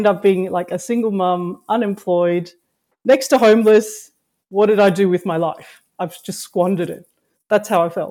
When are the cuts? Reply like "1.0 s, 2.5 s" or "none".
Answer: none